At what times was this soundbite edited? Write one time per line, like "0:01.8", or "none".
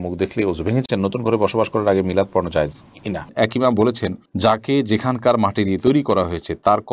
0:00.8
0:03.2